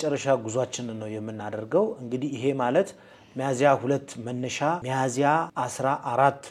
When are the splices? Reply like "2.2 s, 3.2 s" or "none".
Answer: 4.8 s, 5.5 s